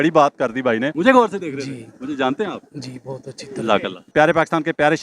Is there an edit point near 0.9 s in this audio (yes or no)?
yes